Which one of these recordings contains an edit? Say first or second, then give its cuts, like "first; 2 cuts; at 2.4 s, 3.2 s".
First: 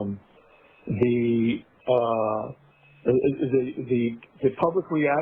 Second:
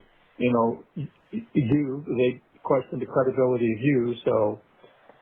second; 1 cut; at 2.9 s